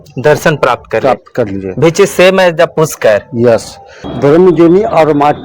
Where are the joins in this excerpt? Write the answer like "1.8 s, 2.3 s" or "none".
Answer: 3.7 s